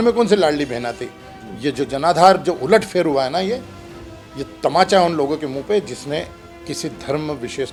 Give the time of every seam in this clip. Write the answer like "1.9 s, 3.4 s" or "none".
none